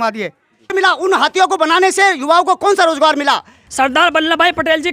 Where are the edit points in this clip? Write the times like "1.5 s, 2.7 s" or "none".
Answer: 0.7 s, 3.6 s